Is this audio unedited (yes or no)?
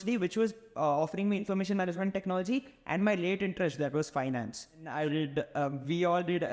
no